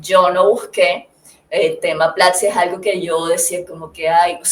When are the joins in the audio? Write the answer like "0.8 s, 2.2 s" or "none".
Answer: none